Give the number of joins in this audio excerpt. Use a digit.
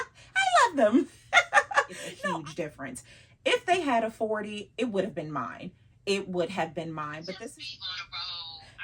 2